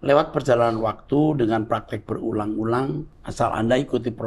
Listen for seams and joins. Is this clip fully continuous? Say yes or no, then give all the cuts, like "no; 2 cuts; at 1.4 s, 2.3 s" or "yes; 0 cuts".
no; 1 cut; at 3.2 s